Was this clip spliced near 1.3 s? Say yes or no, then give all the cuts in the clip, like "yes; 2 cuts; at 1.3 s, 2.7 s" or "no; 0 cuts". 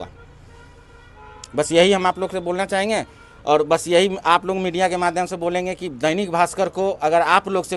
no; 0 cuts